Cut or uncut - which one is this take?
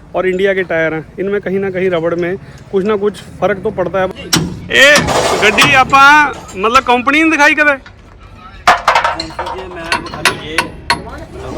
cut